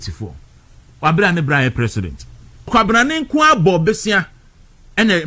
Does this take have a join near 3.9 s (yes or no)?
no